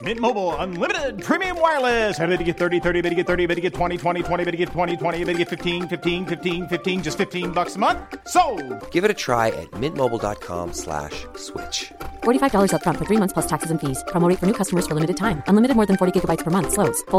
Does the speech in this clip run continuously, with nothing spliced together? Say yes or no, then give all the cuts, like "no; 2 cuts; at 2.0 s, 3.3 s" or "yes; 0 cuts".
yes; 0 cuts